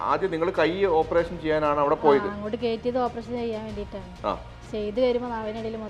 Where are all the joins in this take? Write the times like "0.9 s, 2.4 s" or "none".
none